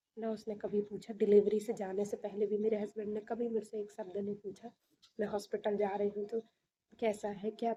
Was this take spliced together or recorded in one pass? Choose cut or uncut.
uncut